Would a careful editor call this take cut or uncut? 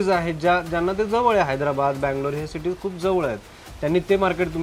uncut